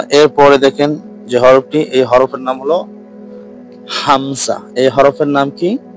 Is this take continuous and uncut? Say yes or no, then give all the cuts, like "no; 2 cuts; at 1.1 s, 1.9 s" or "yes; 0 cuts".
yes; 0 cuts